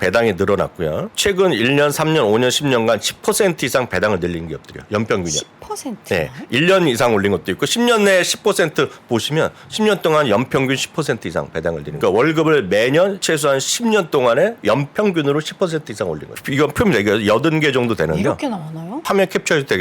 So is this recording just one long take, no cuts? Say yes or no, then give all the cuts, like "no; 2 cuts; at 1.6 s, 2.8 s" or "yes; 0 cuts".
no; 5 cuts; at 1.1 s, 11.9 s, 13.2 s, 16.4 s, 19.0 s